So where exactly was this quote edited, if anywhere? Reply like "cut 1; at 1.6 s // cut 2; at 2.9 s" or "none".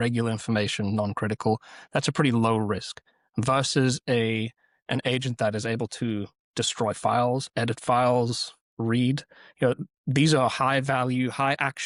none